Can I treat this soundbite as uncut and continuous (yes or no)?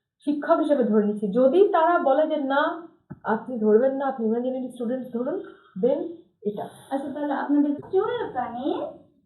no